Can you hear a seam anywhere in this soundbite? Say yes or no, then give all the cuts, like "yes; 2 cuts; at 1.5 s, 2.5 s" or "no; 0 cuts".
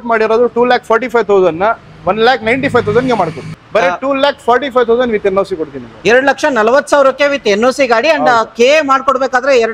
yes; 1 cut; at 3.4 s